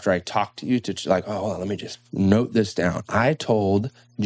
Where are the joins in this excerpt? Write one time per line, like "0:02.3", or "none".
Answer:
none